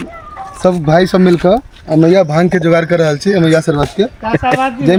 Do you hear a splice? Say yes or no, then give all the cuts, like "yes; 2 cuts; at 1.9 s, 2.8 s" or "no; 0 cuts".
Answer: no; 0 cuts